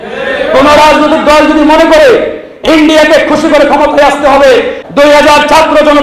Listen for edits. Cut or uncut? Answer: cut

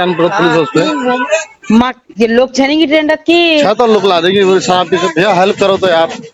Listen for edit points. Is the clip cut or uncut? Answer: uncut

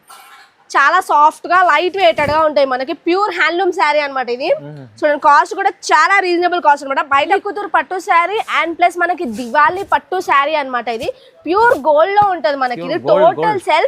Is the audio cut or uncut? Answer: cut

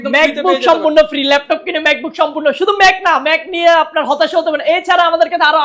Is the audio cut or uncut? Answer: uncut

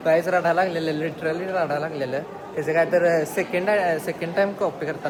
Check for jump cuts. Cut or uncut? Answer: uncut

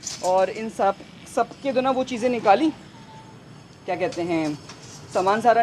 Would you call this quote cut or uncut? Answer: uncut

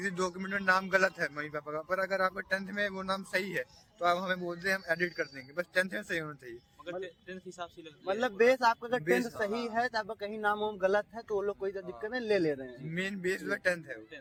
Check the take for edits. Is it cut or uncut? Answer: uncut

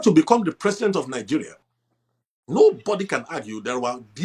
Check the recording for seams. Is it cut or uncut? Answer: uncut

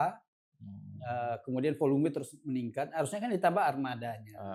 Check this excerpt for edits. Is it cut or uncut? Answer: uncut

